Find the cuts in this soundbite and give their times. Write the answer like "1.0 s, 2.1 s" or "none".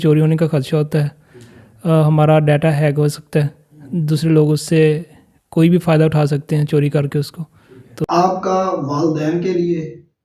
8.0 s